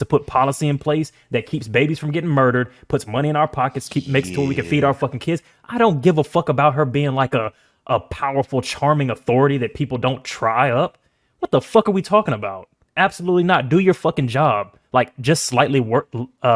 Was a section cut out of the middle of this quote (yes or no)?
no